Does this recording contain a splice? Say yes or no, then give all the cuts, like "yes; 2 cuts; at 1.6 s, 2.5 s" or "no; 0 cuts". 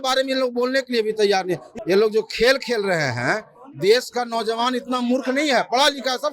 yes; 1 cut; at 1.7 s